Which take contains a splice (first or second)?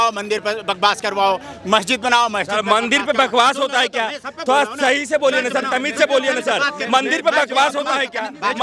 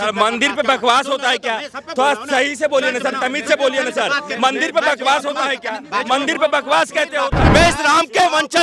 second